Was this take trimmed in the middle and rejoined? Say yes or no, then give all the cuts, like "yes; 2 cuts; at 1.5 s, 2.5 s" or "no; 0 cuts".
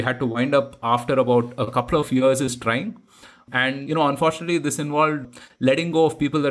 yes; 1 cut; at 3.8 s